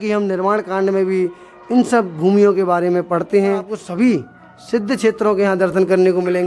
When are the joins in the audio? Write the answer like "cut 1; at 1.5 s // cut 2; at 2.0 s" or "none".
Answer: cut 1; at 3.8 s